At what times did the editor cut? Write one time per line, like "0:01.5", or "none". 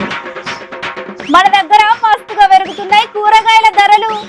0:01.2